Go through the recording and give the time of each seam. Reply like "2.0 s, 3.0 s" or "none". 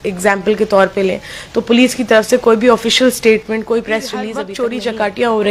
4.4 s